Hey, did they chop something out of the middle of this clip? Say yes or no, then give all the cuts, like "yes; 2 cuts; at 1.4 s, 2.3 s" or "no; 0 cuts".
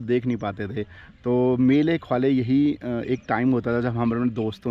no; 0 cuts